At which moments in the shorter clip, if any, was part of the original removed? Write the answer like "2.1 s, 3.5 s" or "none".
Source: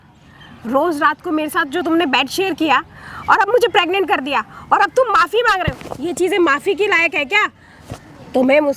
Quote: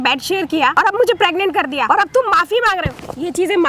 0.7 s, 1.8 s